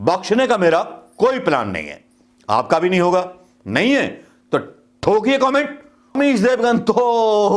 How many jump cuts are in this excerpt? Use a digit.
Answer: 1